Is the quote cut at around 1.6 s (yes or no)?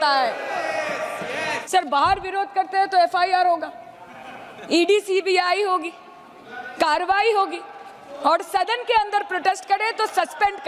yes